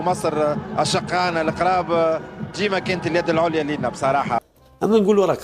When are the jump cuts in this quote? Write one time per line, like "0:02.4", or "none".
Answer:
0:04.4